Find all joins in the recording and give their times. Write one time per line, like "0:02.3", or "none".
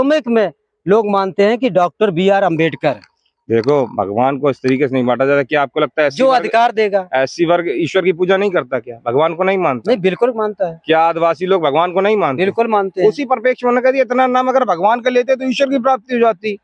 none

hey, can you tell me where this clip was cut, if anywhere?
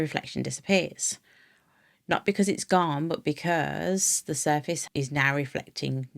0:04.8

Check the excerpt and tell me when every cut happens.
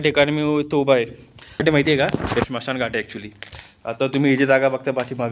0:01.6

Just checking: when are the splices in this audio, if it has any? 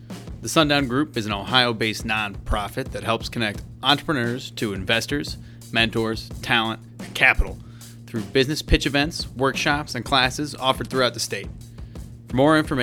none

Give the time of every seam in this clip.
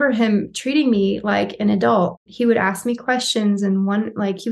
0:02.3

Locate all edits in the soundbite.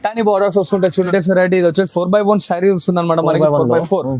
0:01.1

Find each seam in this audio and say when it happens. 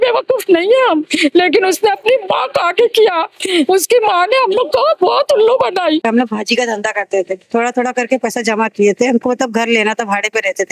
0:06.0

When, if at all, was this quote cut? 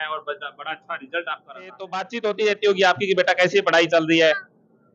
0:02.0

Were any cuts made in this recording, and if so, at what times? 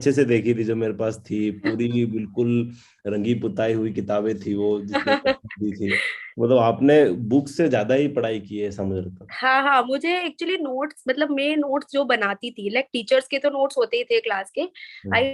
none

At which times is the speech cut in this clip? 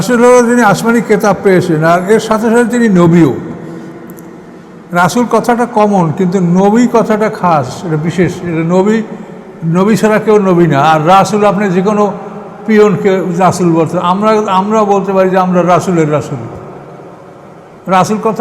none

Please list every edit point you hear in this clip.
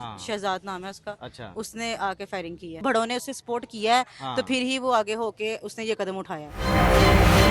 0:02.8
0:06.5

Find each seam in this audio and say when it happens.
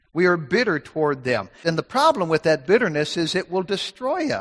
0:01.5

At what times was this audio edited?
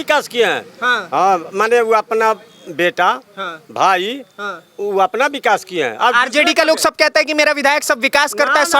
none

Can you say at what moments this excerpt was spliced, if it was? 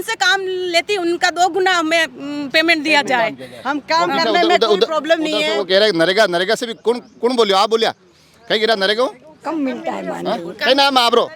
none

